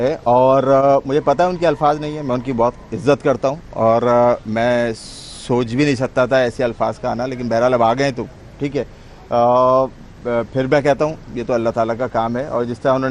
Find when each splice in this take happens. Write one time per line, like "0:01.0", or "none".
0:01.0